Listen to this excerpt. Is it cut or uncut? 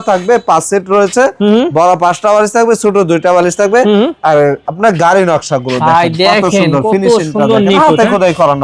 uncut